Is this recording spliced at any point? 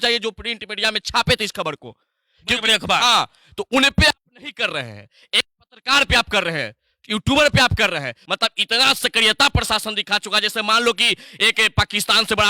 yes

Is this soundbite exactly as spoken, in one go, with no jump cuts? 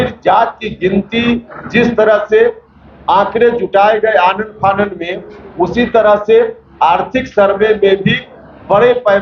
yes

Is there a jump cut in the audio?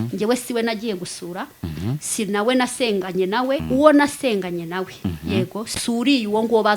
yes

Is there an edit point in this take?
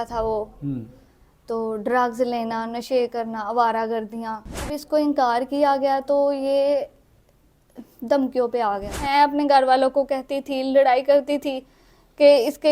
yes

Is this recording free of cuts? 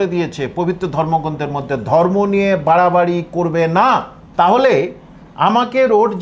no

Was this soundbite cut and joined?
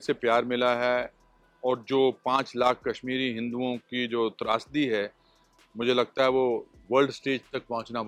no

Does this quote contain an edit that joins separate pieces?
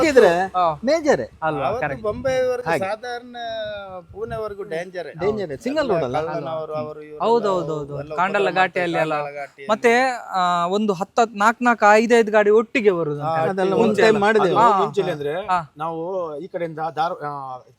no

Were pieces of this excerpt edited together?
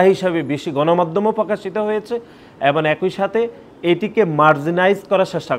no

